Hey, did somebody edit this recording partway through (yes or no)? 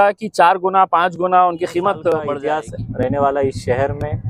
yes